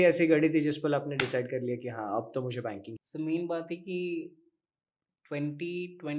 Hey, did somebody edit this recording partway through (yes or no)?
yes